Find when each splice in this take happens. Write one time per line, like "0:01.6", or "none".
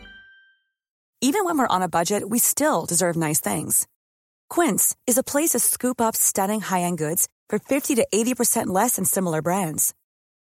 0:01.0